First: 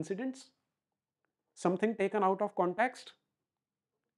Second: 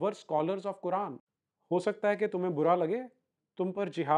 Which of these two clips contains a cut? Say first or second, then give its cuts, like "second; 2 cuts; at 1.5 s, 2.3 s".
second; 1 cut; at 1.2 s